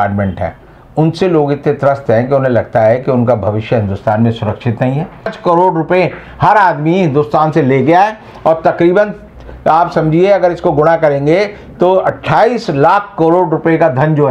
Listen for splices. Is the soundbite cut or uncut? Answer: cut